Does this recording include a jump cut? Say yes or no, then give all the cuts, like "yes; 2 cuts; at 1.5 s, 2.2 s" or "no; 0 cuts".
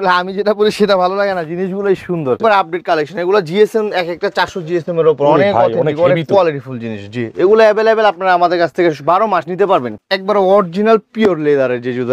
yes; 2 cuts; at 2.4 s, 10.0 s